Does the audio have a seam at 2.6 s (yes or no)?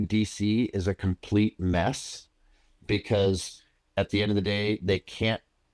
no